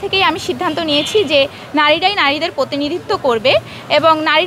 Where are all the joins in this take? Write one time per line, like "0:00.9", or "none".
none

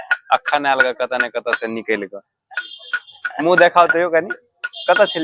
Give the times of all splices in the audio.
none

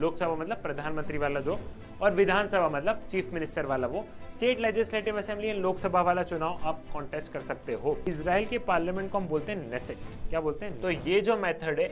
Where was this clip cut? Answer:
0:08.1
0:10.7

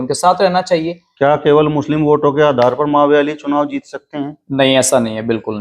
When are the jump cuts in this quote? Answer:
0:01.0

